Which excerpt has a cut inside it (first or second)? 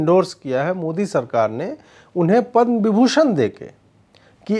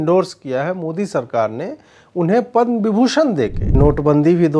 second